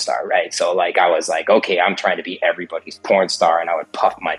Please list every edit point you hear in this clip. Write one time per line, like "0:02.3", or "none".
none

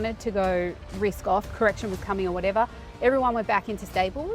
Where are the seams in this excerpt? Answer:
0:01.5

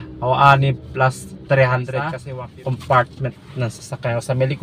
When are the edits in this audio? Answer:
0:02.2

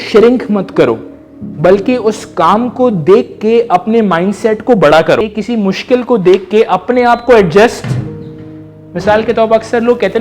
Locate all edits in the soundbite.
0:05.2

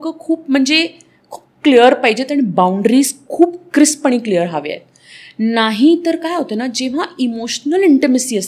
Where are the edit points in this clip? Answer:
none

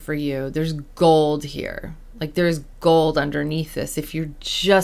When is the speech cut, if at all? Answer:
none

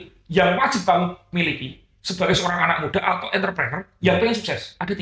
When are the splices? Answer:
none

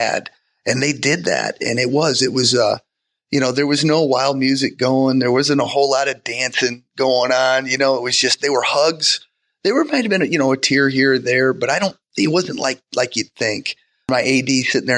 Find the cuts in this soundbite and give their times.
0:14.1

